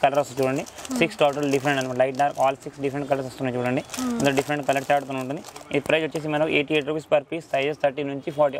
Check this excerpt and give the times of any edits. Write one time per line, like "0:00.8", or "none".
none